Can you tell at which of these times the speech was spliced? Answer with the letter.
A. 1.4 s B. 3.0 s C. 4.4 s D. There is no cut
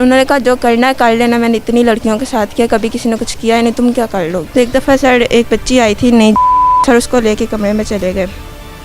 C